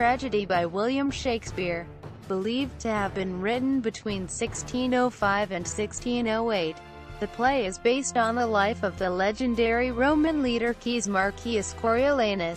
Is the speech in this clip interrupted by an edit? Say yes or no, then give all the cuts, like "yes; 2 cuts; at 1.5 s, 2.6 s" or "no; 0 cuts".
yes; 1 cut; at 7.8 s